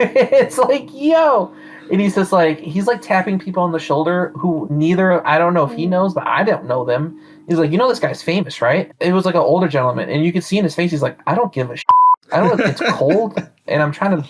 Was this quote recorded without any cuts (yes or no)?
yes